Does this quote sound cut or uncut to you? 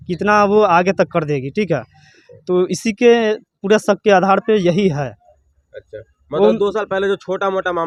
uncut